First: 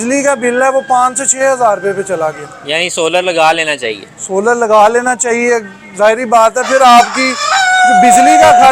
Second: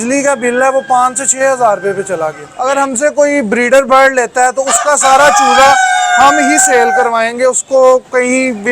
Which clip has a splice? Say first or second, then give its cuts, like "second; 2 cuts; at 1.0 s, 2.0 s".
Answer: second; 1 cut; at 2.5 s